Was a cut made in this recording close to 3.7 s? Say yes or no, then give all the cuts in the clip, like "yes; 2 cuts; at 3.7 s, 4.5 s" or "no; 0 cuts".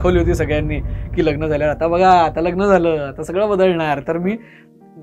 no; 0 cuts